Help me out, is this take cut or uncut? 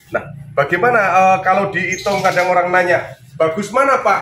uncut